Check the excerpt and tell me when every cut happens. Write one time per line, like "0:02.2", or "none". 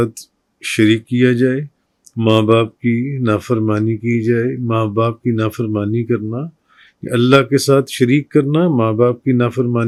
none